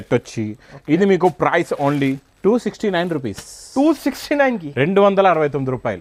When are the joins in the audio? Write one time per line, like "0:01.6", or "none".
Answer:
none